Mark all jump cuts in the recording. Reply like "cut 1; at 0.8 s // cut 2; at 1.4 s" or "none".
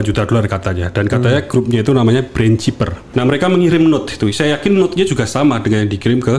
cut 1; at 3.0 s